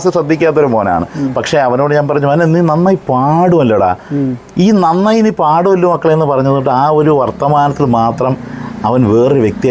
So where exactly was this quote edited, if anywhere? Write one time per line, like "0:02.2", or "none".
none